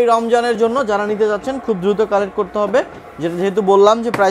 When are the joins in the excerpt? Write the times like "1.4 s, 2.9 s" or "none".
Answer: none